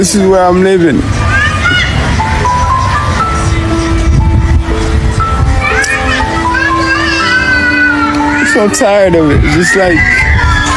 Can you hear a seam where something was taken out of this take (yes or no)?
no